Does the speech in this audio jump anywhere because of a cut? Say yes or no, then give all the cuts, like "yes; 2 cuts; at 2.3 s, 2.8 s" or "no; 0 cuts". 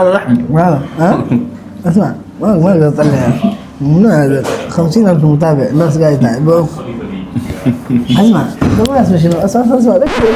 no; 0 cuts